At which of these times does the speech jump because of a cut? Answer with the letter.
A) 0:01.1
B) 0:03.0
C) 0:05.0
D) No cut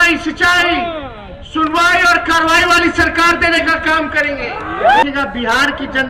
C